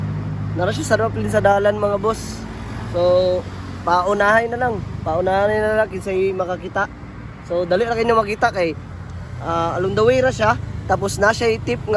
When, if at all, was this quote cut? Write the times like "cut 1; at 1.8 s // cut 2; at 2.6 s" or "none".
none